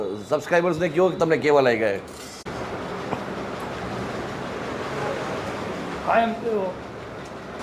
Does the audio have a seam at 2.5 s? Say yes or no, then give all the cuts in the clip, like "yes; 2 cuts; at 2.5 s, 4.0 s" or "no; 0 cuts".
yes; 1 cut; at 2.5 s